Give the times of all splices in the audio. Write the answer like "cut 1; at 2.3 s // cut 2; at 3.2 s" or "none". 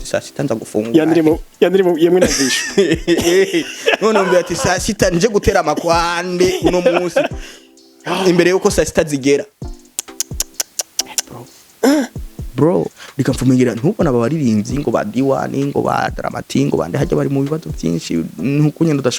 cut 1; at 13.0 s

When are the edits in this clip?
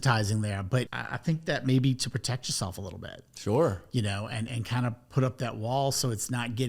cut 1; at 1.0 s

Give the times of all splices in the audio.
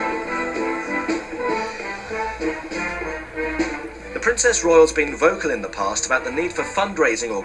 cut 1; at 3.4 s

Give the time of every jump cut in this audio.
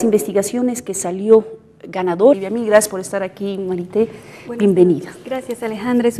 none

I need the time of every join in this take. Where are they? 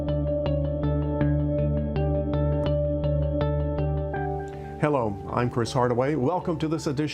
cut 1; at 0.9 s

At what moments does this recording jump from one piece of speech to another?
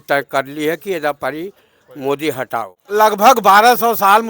cut 1; at 2.8 s

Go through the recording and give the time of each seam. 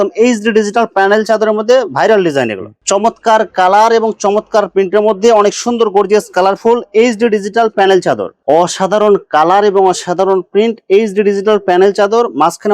cut 1; at 2.7 s // cut 2; at 8.3 s

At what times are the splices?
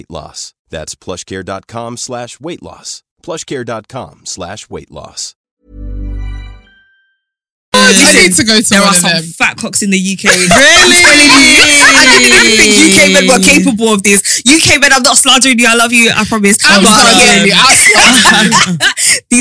cut 1; at 7.7 s

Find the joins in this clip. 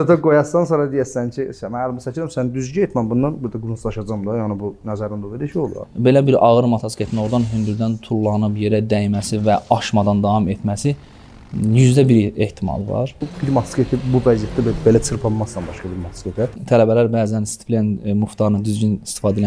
cut 1; at 5.8 s // cut 2; at 13.3 s // cut 3; at 16.6 s

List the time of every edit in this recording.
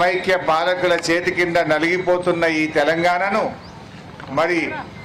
cut 1; at 1.3 s

